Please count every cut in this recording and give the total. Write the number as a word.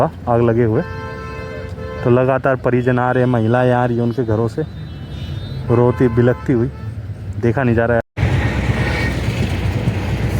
one